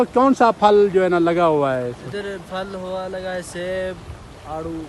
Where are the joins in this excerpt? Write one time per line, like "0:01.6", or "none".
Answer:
none